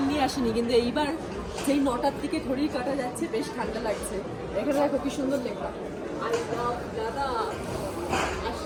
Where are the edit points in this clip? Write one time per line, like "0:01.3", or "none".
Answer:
none